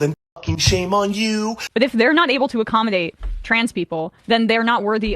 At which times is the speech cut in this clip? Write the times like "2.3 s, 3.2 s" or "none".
1.6 s